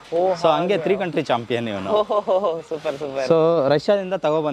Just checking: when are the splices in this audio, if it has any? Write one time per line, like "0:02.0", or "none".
none